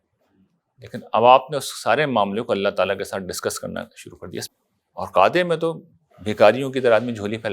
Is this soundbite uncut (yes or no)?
no